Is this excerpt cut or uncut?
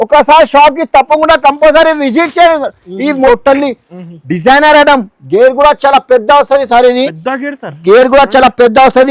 cut